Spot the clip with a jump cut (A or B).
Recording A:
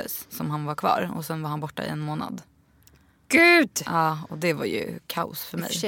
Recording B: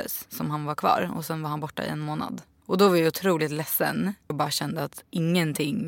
B